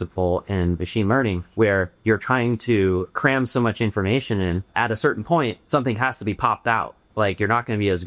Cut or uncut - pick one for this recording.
cut